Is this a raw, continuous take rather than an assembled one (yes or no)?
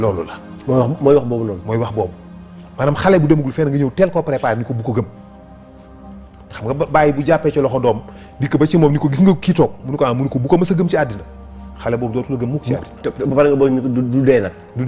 yes